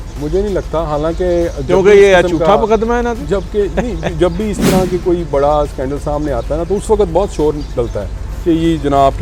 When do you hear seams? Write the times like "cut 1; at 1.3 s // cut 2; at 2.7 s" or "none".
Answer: none

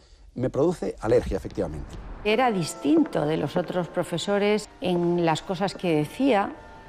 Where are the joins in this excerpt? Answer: cut 1; at 2.3 s // cut 2; at 4.7 s

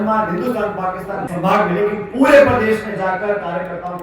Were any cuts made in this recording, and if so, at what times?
cut 1; at 1.3 s

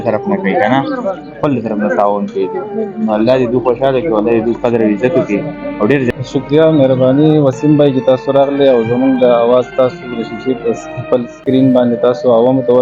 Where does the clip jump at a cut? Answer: cut 1; at 6.2 s

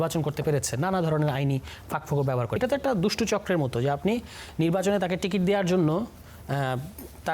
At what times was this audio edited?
cut 1; at 2.6 s

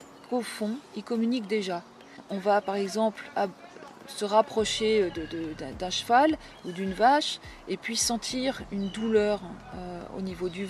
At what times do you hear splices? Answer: cut 1; at 2.1 s

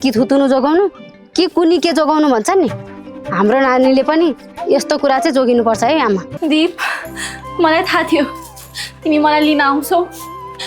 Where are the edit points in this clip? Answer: cut 1; at 6.3 s

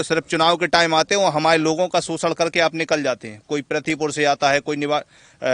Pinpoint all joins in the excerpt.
none

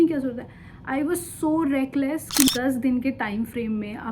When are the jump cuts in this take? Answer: cut 1; at 2.5 s

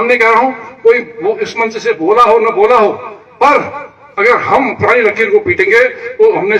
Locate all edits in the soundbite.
none

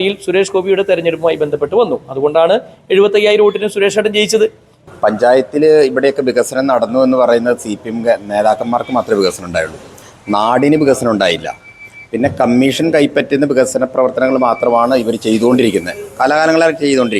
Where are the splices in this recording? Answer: cut 1; at 4.7 s

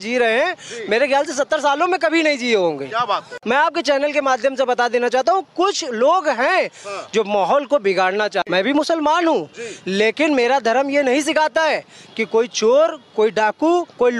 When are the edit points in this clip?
cut 1; at 3.3 s // cut 2; at 8.4 s

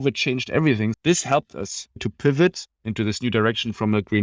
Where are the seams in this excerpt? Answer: cut 1; at 1.0 s // cut 2; at 2.0 s

